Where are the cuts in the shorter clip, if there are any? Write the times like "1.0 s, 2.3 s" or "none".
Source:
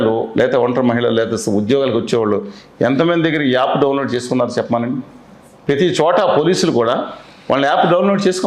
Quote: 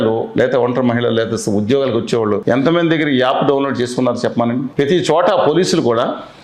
2.4 s, 4.7 s